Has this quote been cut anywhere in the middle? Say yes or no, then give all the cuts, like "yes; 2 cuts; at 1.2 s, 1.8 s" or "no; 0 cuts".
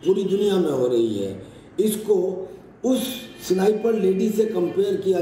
yes; 1 cut; at 2.3 s